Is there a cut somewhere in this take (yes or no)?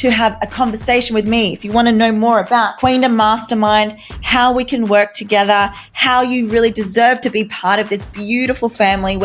yes